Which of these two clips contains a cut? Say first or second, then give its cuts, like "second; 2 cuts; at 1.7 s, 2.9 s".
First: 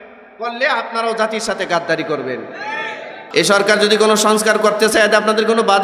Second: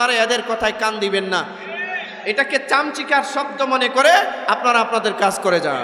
first; 1 cut; at 3.2 s